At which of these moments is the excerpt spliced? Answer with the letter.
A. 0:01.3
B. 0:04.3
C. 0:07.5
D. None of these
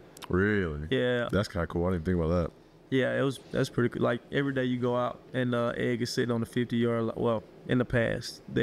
A